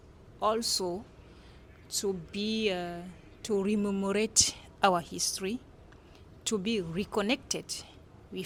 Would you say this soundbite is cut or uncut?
uncut